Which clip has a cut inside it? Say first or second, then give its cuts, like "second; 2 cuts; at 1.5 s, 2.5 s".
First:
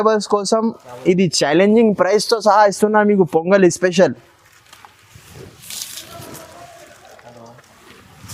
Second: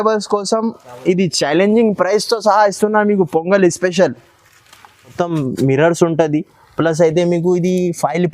second; 1 cut; at 5.1 s